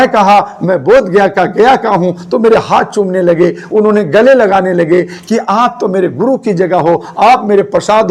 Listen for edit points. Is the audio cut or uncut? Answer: uncut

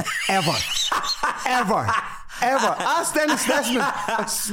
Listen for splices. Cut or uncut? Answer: uncut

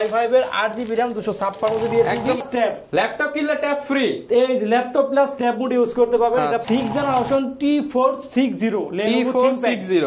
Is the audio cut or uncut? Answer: cut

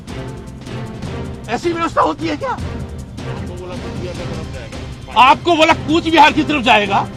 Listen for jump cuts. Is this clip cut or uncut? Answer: uncut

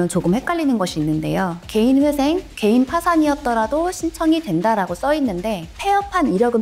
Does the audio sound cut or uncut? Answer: uncut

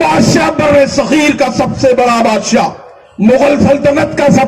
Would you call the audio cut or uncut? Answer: uncut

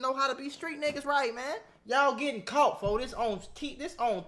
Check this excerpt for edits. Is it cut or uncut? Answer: uncut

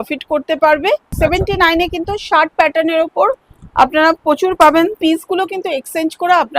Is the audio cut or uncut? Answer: cut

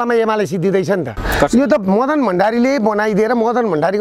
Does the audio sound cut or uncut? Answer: cut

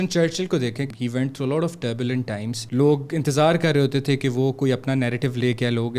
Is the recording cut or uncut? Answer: cut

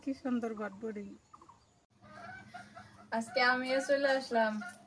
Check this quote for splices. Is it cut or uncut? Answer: cut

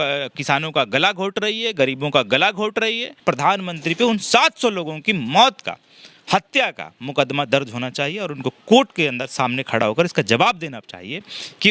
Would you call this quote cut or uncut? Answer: cut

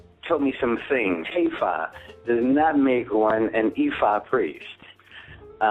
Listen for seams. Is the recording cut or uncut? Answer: uncut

